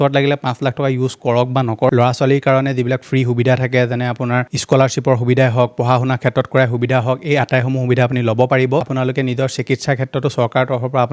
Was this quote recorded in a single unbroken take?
no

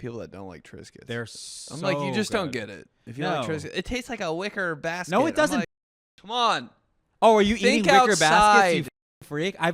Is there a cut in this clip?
yes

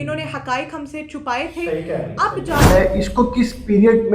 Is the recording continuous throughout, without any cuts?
no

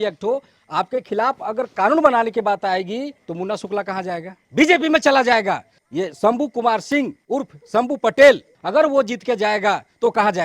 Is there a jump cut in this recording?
yes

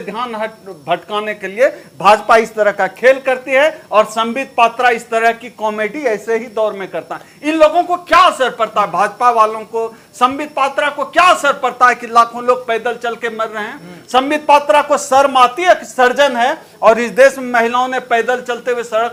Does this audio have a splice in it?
no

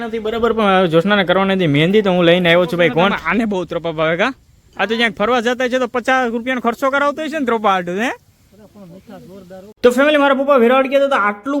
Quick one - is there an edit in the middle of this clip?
yes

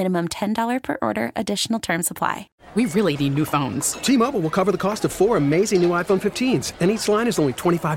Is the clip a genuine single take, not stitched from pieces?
no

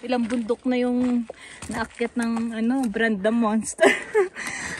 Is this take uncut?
yes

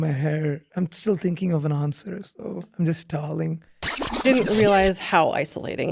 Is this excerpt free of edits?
no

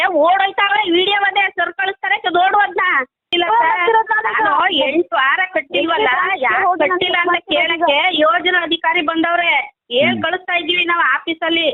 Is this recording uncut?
no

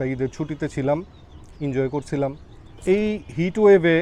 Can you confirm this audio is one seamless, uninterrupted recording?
no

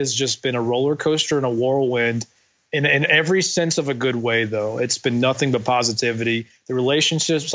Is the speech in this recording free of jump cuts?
yes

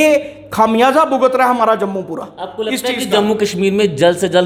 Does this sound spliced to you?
no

